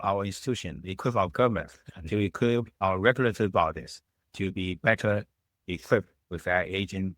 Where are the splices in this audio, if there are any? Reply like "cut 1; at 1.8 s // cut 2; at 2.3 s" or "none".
cut 1; at 5.4 s